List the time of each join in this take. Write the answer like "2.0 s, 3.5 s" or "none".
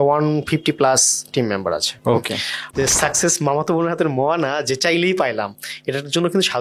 2.6 s

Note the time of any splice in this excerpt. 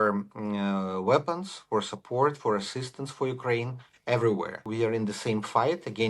4.6 s

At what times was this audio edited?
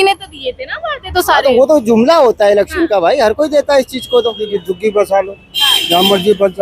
4.5 s

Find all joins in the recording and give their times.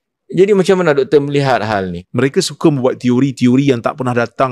2.0 s

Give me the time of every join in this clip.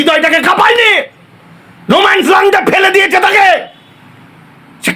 none

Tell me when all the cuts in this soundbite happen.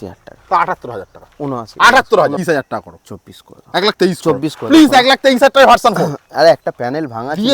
2.4 s

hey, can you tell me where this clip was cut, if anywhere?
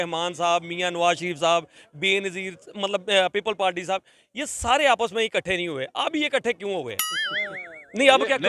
none

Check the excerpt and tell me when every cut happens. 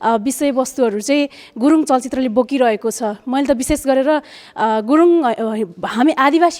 none

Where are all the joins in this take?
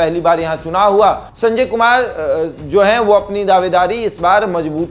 1.3 s

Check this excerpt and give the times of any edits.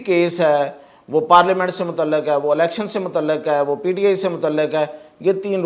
none

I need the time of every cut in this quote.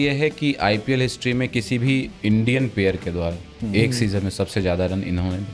none

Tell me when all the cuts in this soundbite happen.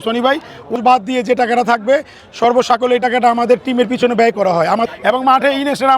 0.8 s, 4.9 s

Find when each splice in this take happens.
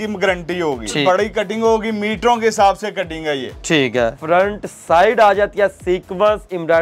1.0 s, 4.2 s

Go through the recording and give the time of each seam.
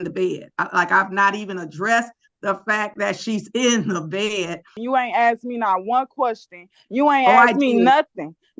4.8 s

